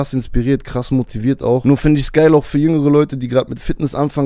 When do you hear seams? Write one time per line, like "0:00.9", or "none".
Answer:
0:01.6